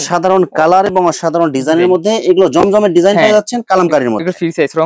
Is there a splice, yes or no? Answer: no